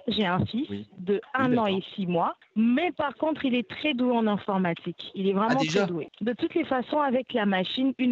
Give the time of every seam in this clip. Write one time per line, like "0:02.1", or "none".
0:02.4
0:06.1